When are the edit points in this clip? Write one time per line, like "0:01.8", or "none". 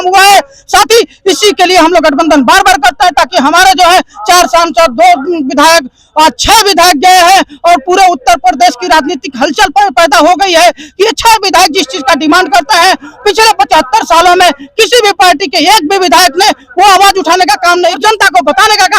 0:18.0